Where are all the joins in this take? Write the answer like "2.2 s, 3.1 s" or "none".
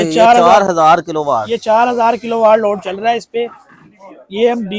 none